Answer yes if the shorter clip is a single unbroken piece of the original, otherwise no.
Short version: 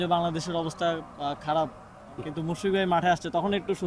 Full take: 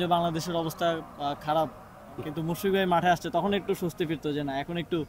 yes